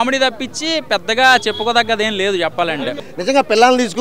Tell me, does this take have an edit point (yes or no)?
yes